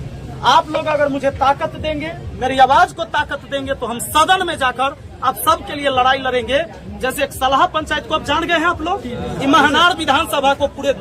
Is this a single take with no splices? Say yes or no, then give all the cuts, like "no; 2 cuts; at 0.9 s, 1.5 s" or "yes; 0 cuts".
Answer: yes; 0 cuts